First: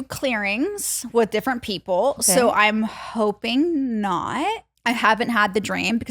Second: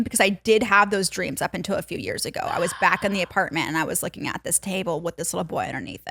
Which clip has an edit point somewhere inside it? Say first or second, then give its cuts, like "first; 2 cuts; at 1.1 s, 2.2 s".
first; 1 cut; at 4.7 s